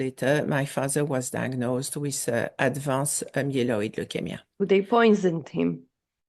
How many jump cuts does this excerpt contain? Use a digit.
1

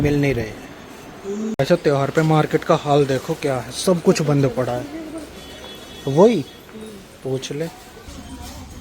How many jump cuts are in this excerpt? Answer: 1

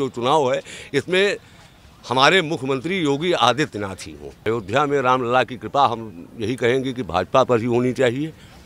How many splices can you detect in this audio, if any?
1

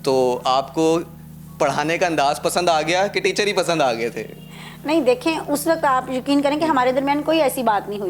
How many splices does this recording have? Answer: 0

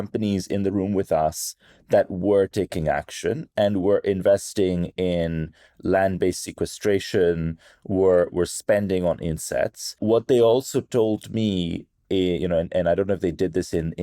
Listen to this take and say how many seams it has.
1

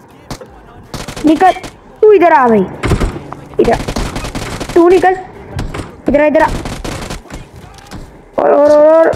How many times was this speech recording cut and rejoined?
1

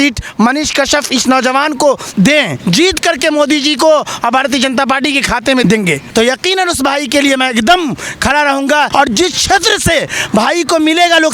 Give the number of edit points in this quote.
3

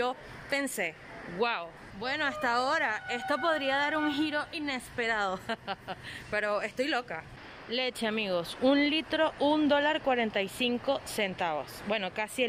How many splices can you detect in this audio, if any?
0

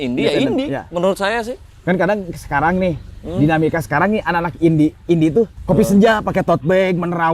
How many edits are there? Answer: 1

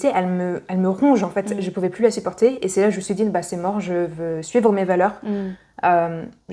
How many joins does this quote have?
0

